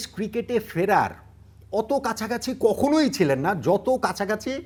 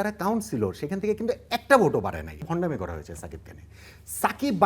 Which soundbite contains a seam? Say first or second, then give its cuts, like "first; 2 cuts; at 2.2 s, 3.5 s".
second; 1 cut; at 2.4 s